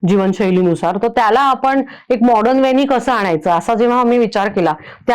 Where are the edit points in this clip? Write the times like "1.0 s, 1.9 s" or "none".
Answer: none